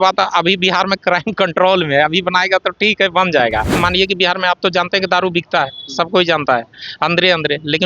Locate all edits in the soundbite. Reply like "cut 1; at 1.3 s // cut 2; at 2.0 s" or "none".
cut 1; at 3.7 s